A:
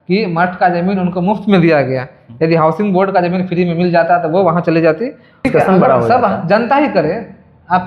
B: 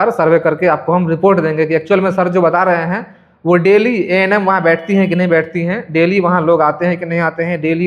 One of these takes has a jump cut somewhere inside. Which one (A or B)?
A